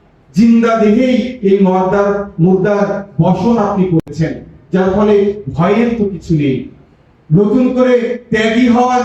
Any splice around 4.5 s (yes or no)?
no